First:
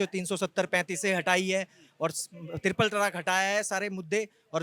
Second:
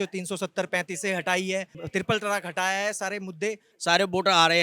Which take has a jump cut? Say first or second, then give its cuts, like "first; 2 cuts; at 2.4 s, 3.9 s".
second; 2 cuts; at 1.8 s, 3.7 s